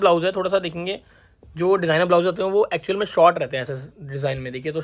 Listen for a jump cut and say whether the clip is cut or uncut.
uncut